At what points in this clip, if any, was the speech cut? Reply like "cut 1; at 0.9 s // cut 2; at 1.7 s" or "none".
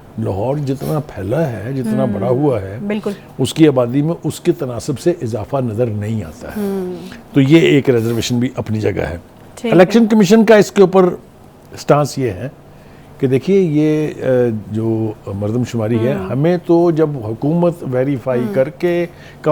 none

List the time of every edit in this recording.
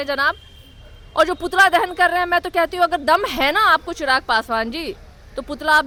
none

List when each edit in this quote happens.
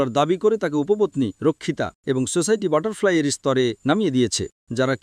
none

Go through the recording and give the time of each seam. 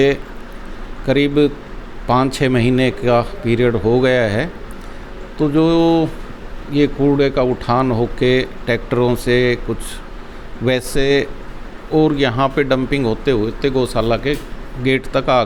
none

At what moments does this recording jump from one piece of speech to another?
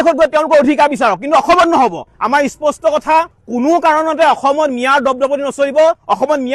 cut 1; at 2.1 s // cut 2; at 3.3 s

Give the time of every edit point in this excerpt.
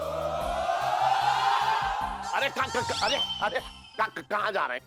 none

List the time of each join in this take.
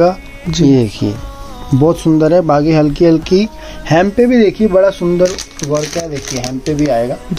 none

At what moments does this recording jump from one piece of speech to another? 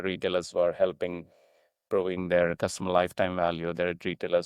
cut 1; at 1.8 s

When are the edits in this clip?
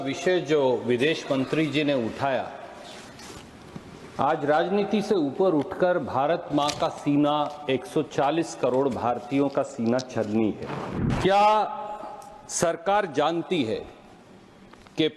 cut 1; at 11.0 s

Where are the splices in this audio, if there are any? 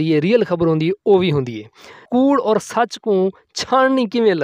cut 1; at 1.9 s

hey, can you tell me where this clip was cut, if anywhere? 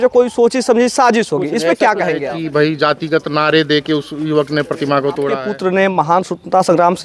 cut 1; at 2.2 s // cut 2; at 5.4 s

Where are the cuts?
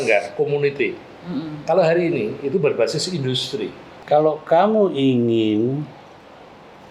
cut 1; at 3.9 s

